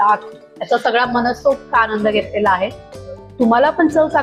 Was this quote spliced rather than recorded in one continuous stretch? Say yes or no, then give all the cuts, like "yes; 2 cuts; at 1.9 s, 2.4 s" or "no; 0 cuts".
no; 0 cuts